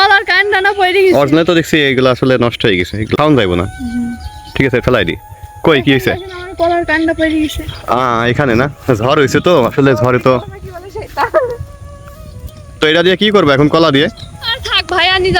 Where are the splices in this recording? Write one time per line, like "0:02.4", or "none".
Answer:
0:04.8